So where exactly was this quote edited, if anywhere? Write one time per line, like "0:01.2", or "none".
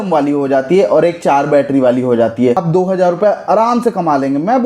0:02.6